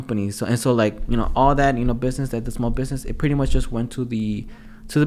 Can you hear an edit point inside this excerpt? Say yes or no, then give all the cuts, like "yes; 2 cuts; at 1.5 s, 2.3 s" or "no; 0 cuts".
no; 0 cuts